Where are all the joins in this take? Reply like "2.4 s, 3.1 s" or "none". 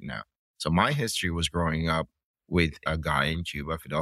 2.8 s